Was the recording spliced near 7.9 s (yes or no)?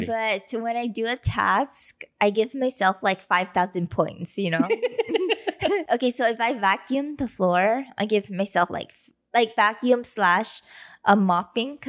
no